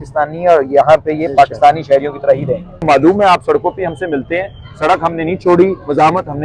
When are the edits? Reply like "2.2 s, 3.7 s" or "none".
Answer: 2.8 s